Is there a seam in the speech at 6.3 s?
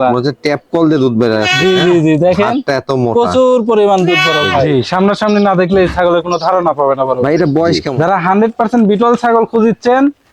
no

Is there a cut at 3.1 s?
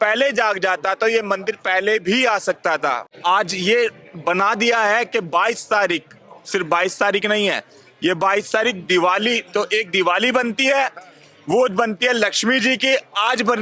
yes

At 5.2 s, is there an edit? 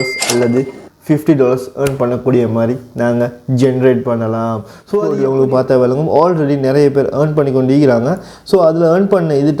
yes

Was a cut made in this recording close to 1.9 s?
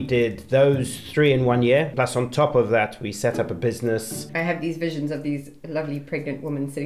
yes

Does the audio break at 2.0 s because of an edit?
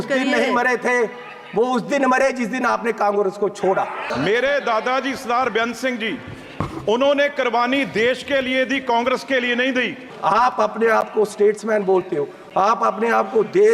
no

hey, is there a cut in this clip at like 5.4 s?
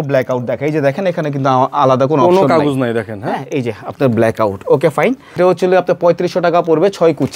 yes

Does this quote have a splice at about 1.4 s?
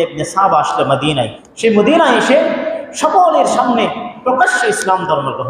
yes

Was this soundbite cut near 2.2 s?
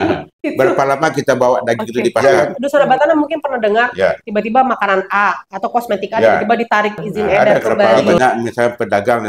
yes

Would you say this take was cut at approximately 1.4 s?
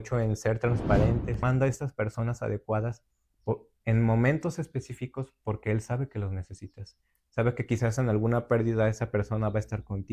yes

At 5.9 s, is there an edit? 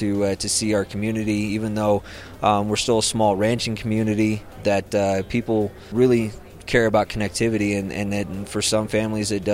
yes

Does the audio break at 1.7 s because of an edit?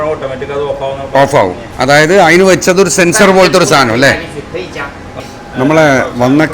no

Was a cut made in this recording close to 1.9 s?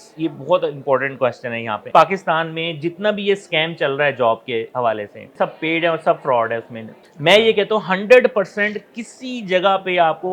yes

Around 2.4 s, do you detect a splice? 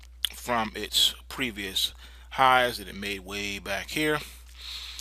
yes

